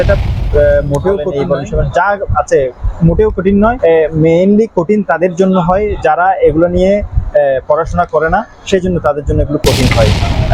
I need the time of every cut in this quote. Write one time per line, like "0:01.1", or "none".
none